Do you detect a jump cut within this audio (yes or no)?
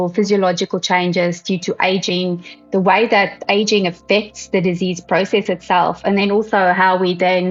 no